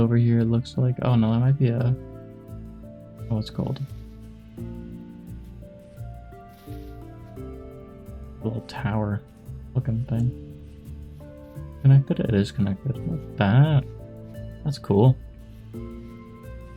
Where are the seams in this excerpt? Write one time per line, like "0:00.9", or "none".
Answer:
none